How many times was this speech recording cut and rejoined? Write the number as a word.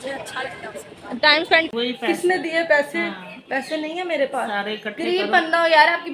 one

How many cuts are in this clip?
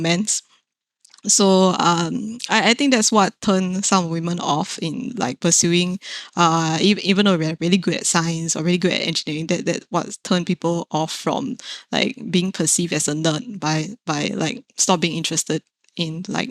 zero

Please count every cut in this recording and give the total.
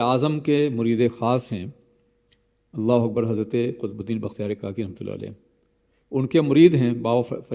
zero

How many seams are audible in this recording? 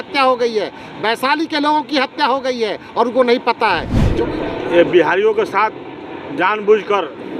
one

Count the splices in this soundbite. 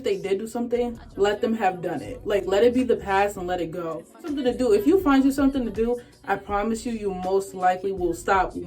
one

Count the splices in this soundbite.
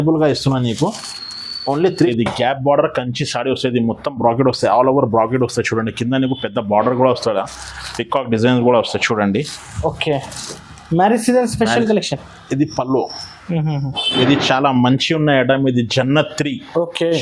two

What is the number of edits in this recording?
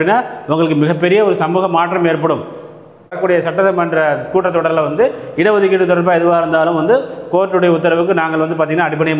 one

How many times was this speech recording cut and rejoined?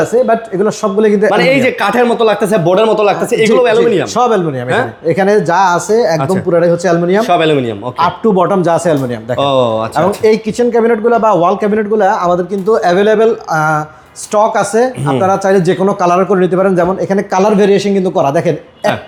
zero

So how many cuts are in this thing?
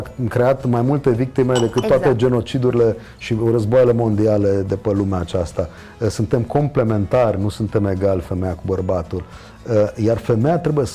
zero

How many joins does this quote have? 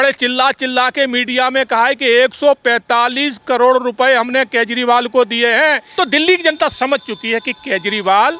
one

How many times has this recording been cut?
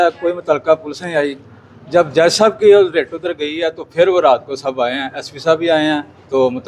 zero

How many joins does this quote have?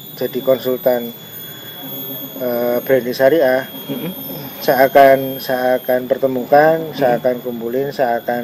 zero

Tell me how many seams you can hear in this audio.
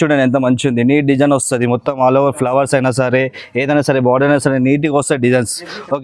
zero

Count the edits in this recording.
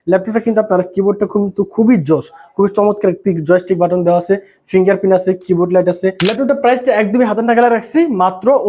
one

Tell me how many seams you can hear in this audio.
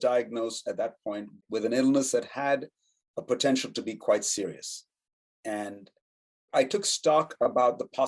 one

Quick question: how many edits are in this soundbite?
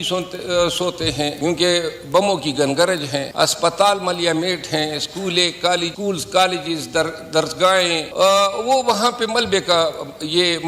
four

